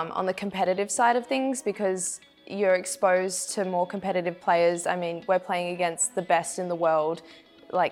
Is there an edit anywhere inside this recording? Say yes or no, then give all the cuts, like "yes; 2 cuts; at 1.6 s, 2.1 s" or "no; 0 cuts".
no; 0 cuts